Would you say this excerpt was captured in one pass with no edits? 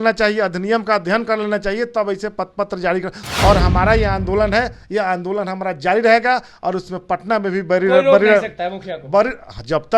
no; 1 cut; at 3.2 s

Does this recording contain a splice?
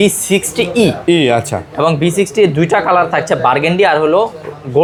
no; 0 cuts

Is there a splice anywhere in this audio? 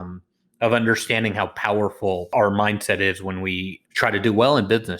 yes; 2 cuts; at 2.3 s, 3.7 s

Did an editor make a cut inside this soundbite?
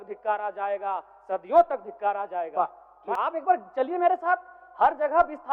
yes; 1 cut; at 3.2 s

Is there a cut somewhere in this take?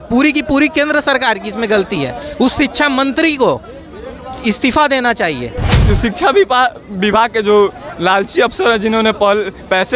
yes; 1 cut; at 5.8 s

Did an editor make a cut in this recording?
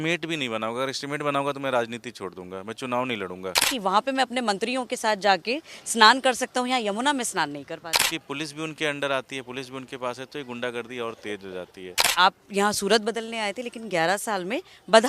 yes; 3 cuts; at 3.6 s, 8.0 s, 12.1 s

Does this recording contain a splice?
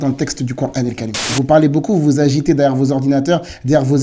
yes; 1 cut; at 1.1 s

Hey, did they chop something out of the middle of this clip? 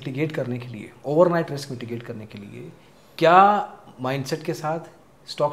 no; 0 cuts

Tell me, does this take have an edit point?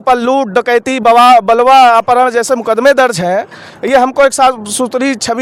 no; 0 cuts

